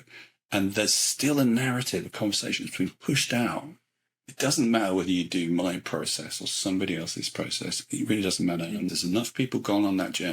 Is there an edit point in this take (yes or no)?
yes